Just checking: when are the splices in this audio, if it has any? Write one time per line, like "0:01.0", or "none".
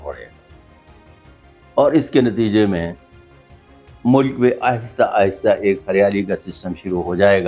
none